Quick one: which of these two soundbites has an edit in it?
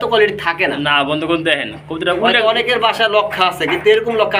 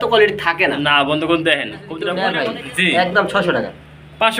second; 1 cut; at 2.1 s

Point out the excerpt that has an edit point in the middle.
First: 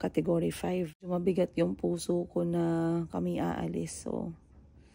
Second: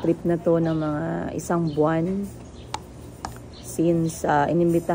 first; 1 cut; at 1.0 s

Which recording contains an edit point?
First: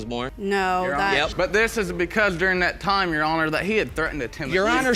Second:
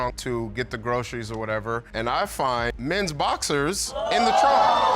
second; 1 cut; at 2.7 s

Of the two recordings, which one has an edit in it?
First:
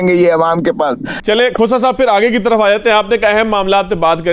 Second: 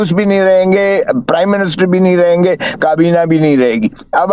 first; 1 cut; at 1.1 s

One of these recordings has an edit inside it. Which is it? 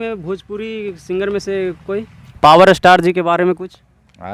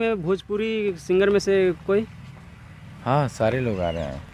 first; 1 cut; at 2.2 s

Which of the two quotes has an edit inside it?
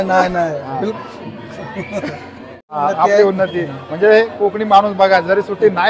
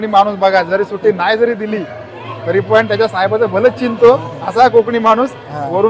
first; 1 cut; at 2.8 s

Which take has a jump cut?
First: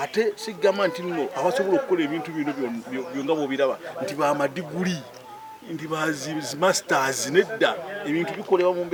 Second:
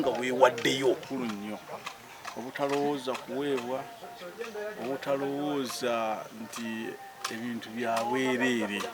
second; 1 cut; at 1.0 s

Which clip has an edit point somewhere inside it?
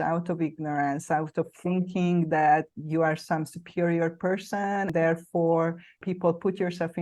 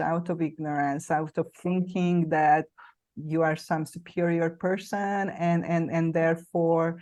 first; 3 cuts; at 2.8 s, 4.9 s, 6.0 s

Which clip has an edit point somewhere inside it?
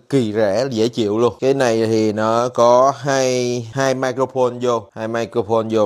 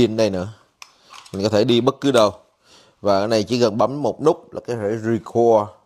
first; 3 cuts; at 1.4 s, 3.7 s, 4.9 s

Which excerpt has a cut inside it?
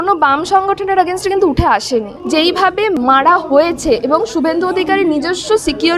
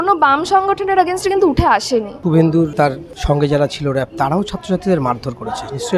first; 2 cuts; at 2.1 s, 3.0 s

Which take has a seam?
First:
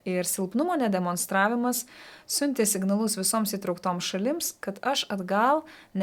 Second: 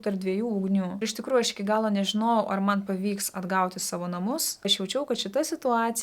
second; 2 cuts; at 1.0 s, 4.7 s

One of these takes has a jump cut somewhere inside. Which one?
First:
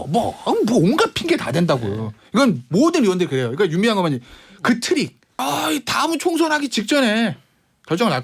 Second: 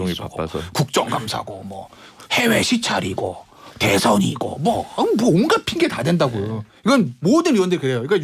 first; 1 cut; at 5.3 s

